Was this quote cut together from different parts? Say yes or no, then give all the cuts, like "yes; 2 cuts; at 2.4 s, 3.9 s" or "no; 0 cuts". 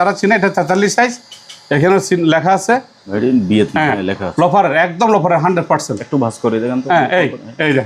yes; 1 cut; at 3.0 s